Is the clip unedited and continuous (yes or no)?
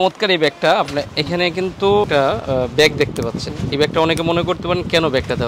no